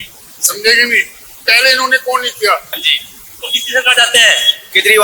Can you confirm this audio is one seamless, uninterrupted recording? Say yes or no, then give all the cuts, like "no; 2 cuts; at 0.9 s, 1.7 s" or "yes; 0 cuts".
no; 1 cut; at 2.8 s